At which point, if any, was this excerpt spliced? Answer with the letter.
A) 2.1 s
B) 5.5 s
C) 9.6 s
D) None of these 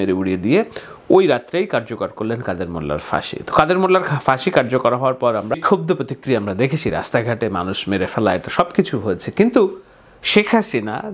B